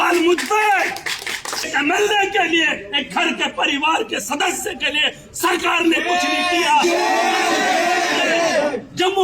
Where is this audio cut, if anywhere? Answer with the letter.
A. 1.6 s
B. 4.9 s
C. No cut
A